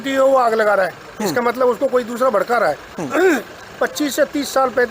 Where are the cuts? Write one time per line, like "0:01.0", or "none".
none